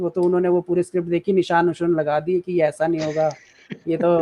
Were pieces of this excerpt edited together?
no; 0 cuts

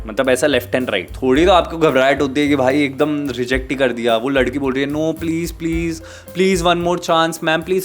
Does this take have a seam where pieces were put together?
yes; 1 cut; at 1.1 s

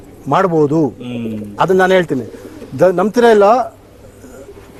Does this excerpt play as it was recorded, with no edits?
yes; 0 cuts

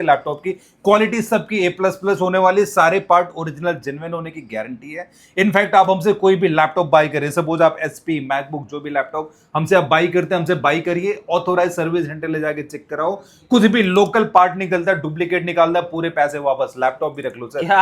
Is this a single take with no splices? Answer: yes; 0 cuts

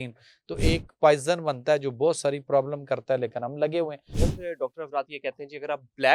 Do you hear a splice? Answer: yes; 1 cut; at 4.1 s

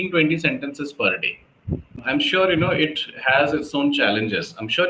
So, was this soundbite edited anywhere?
yes; 1 cut; at 2.0 s

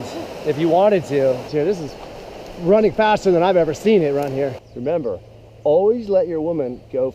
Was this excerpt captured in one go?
no; 2 cuts; at 1.5 s, 4.7 s

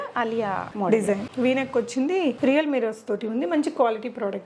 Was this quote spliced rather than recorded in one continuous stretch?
yes; 2 cuts; at 1.1 s, 2.4 s

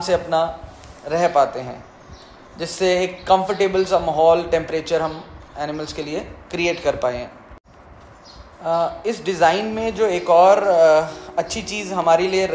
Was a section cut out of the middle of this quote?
no; 0 cuts

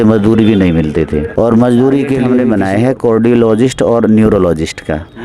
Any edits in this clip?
yes; 1 cut; at 2.3 s

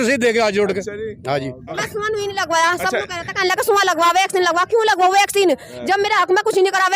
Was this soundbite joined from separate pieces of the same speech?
yes; 1 cut; at 1.8 s

